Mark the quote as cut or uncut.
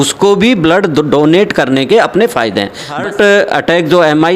cut